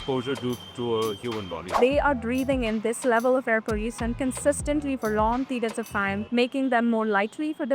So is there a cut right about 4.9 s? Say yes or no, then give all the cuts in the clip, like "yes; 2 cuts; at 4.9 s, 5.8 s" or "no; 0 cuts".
no; 2 cuts; at 1.7 s, 6.2 s